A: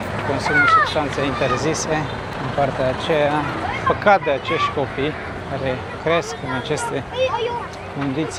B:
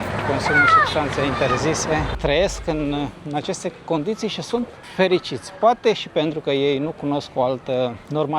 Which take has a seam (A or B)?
B